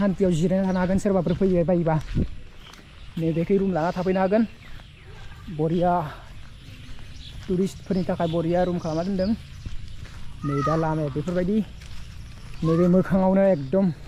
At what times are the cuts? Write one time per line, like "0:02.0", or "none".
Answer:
none

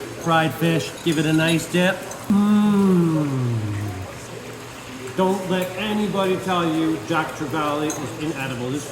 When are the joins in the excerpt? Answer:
0:00.9
0:02.3
0:04.3

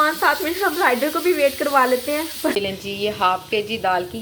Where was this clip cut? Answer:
0:02.5

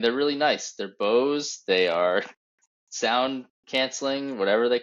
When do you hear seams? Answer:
none

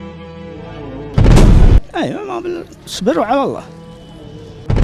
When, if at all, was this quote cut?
0:01.8

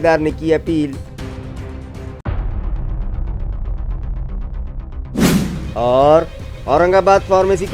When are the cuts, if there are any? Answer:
none

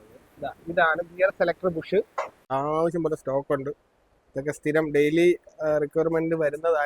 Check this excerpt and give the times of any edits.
0:02.4

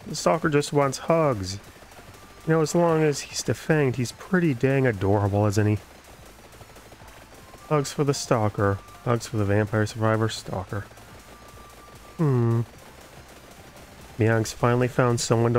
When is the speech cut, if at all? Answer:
none

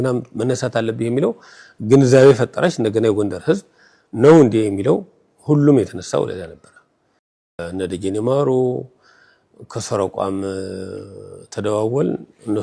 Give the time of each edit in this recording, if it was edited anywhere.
0:07.5

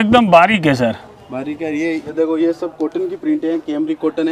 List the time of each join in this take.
0:02.1

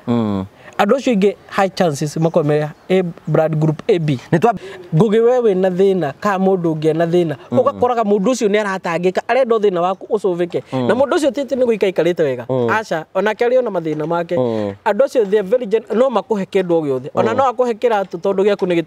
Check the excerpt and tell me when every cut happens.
0:04.5

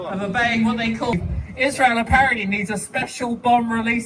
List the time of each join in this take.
0:01.1

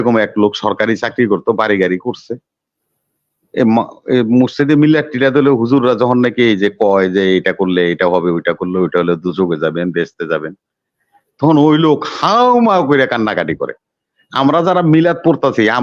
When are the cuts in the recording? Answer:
none

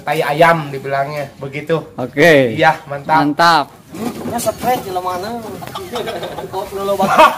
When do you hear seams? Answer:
0:03.8

